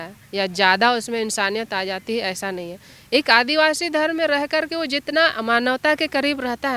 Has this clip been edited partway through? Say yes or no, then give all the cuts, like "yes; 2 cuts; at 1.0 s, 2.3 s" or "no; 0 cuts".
no; 0 cuts